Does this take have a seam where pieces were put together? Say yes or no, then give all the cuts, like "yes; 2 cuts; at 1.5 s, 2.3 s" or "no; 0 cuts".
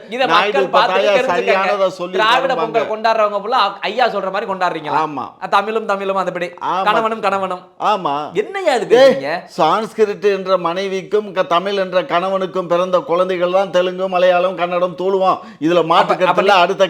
no; 0 cuts